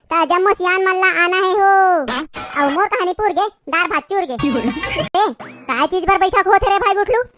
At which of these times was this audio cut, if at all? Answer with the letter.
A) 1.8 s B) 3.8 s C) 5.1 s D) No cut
C